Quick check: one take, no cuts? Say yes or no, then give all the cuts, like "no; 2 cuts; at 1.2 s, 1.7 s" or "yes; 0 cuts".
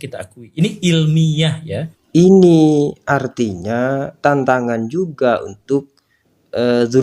no; 1 cut; at 2.0 s